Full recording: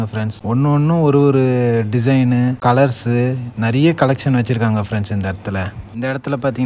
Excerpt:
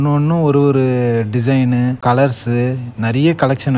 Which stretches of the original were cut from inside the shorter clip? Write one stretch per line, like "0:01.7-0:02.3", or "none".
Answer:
none